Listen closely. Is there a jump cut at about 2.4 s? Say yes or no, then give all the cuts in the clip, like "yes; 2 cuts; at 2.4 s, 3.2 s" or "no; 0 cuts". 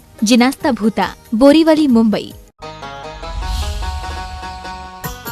yes; 1 cut; at 2.4 s